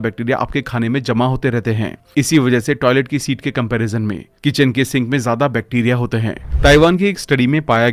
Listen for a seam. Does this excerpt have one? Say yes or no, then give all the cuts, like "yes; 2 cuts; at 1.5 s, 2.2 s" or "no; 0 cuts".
yes; 1 cut; at 6.4 s